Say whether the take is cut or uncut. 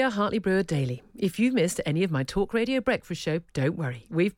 uncut